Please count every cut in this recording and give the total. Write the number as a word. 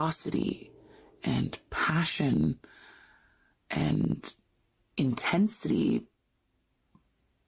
zero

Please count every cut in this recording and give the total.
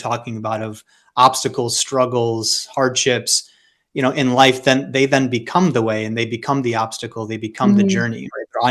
zero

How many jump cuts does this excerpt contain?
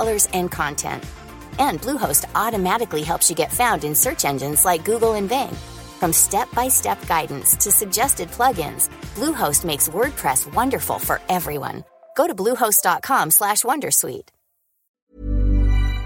one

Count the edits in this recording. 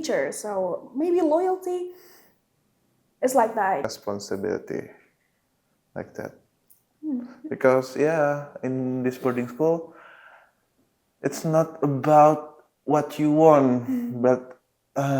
one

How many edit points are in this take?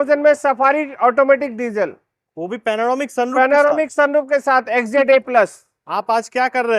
zero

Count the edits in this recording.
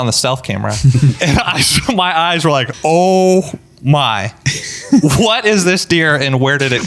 two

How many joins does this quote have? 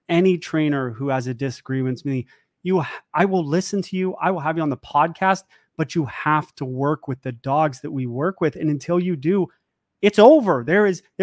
zero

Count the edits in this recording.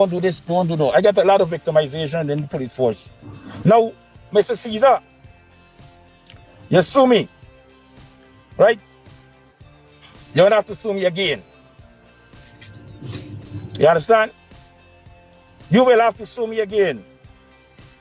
zero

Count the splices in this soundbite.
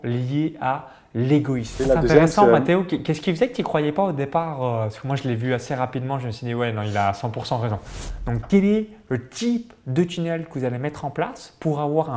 two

